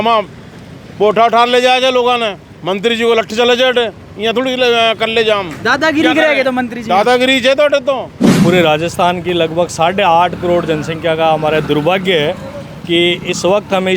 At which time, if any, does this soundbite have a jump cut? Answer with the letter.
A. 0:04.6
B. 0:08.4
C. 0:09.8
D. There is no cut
B